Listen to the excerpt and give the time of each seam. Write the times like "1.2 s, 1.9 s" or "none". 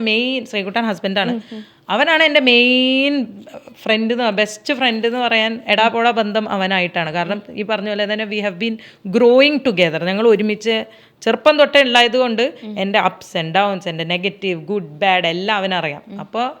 none